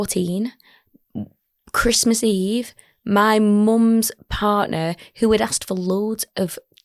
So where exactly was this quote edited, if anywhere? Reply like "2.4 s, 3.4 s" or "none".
none